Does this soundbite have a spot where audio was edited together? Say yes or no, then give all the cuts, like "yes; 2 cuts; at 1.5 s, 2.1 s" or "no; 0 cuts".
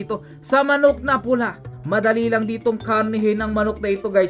yes; 1 cut; at 1.7 s